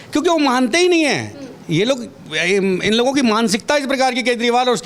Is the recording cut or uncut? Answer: uncut